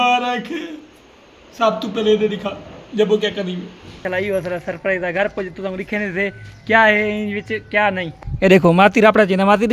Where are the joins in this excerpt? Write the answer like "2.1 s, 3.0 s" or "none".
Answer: 1.5 s, 4.0 s